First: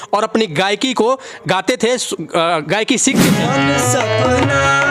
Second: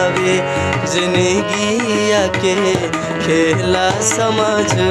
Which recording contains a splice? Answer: first; 1 cut; at 3.3 s

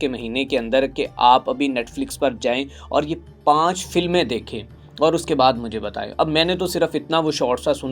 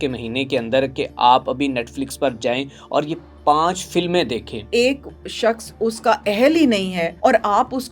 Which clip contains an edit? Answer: second; 2 cuts; at 4.7 s, 7.0 s

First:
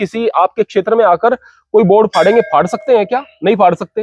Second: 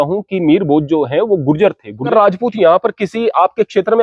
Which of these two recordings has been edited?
second; 1 cut; at 2.1 s

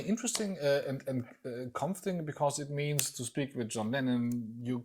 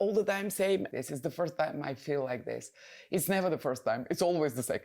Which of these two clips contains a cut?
second; 1 cut; at 0.9 s

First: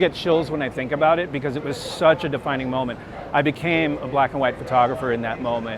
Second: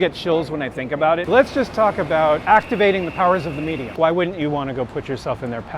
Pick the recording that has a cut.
second; 2 cuts; at 1.2 s, 3.9 s

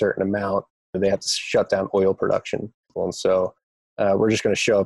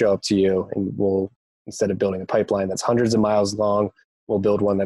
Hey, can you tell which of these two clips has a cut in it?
first; 3 cuts; at 1.0 s, 2.9 s, 3.8 s

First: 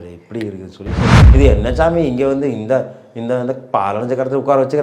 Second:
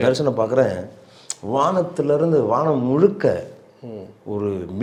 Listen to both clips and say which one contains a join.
first; 1 cut; at 1.2 s

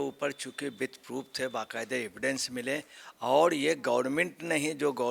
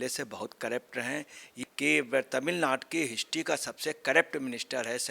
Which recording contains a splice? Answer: second; 1 cut; at 1.6 s

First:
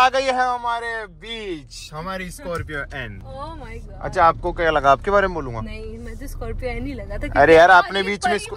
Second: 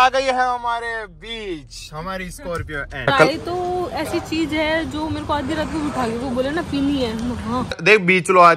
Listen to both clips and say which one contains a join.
second; 2 cuts; at 3.1 s, 7.6 s

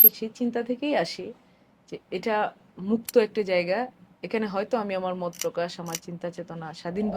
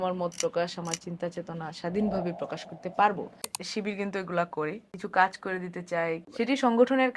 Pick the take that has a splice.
second; 3 cuts; at 3.6 s, 4.9 s, 6.3 s

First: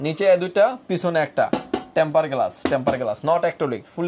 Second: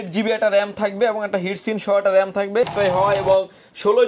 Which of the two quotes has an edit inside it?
second; 1 cut; at 2.7 s

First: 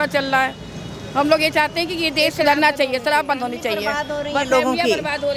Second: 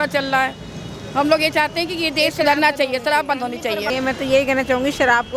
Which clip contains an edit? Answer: second; 1 cut; at 3.9 s

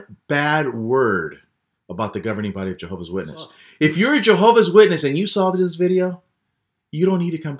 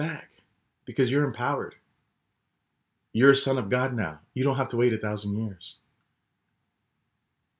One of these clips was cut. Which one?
first; 1 cut; at 3.6 s

